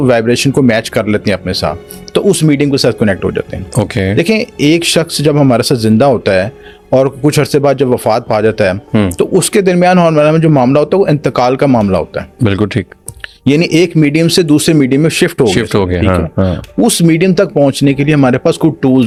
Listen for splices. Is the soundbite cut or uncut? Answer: uncut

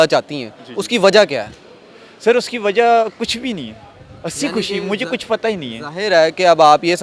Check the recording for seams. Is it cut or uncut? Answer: uncut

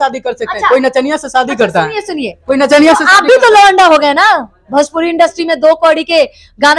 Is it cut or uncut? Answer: uncut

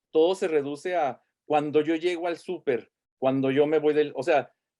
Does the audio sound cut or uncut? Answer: uncut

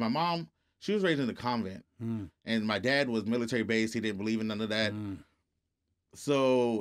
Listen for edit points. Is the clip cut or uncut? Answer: uncut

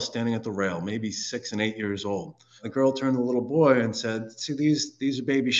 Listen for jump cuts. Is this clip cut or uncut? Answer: uncut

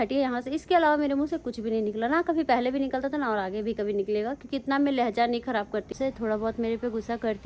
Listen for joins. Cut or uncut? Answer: cut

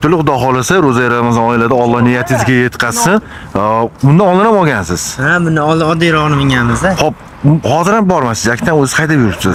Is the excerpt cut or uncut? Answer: uncut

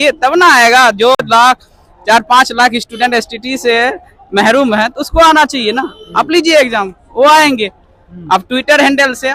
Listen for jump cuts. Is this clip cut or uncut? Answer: uncut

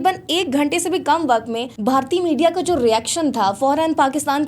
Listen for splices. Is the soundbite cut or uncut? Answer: cut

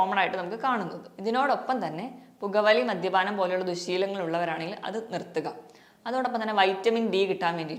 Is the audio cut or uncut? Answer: uncut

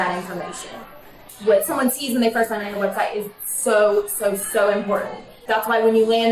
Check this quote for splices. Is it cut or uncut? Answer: cut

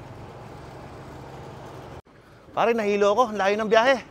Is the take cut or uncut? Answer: cut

